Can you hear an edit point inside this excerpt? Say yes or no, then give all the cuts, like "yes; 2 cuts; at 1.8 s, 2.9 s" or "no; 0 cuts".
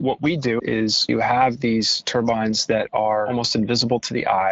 yes; 3 cuts; at 0.9 s, 2.0 s, 3.3 s